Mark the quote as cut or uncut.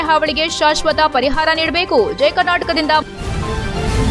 cut